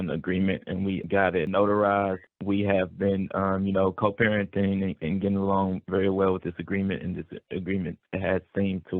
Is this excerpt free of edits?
no; 2 cuts; at 1.0 s, 2.2 s

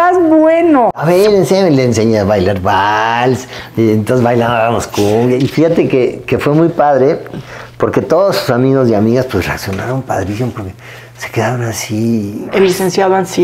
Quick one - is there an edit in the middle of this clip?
yes; 3 cuts; at 1.0 s, 5.4 s, 12.5 s

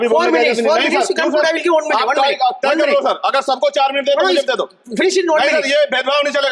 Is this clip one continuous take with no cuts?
yes; 0 cuts

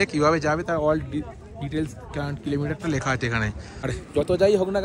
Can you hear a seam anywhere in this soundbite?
yes; 1 cut; at 3.8 s

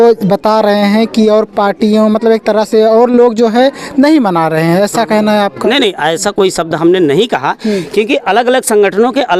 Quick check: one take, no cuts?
yes; 0 cuts

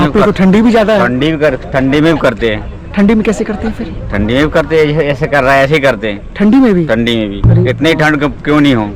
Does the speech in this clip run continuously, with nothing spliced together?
yes; 0 cuts

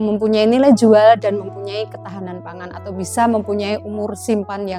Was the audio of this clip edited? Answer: no; 0 cuts

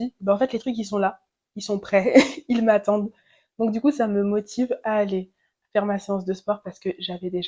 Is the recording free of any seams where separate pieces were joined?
yes; 0 cuts

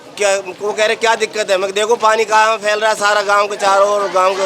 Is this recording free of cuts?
yes; 0 cuts

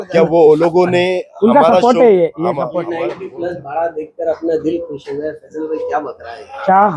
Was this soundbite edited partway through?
yes; 1 cut; at 2.9 s

